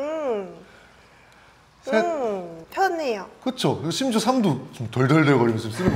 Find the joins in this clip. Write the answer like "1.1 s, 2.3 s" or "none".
2.6 s